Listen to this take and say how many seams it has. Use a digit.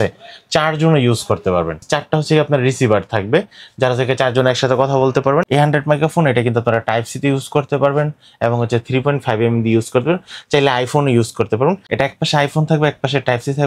2